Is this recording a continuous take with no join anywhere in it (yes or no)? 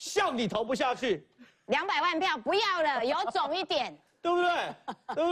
yes